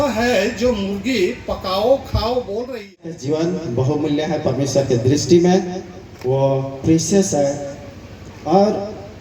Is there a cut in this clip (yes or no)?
yes